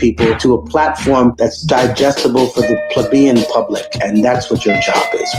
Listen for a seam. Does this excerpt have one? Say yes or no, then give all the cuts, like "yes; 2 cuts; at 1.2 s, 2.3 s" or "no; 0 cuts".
yes; 1 cut; at 4.3 s